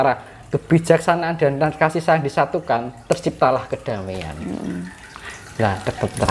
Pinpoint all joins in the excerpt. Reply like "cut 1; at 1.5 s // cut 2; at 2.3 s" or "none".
none

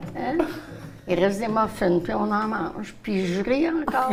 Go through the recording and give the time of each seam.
none

